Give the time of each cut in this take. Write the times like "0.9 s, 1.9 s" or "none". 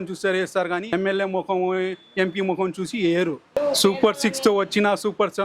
0.9 s, 3.6 s